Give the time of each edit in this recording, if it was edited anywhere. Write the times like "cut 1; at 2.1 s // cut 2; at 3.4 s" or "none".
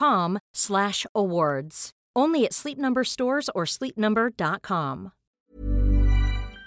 cut 1; at 5.2 s